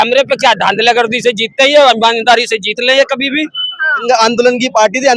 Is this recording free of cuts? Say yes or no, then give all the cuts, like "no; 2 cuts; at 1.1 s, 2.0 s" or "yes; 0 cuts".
no; 1 cut; at 4.0 s